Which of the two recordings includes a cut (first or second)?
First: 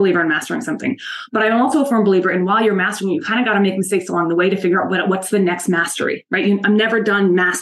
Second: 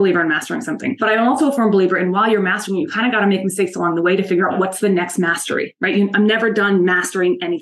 second